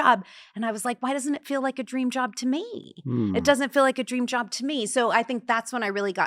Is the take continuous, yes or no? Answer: yes